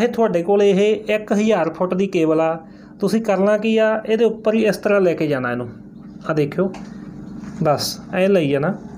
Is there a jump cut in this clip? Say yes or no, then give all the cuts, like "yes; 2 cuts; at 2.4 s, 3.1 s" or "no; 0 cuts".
no; 0 cuts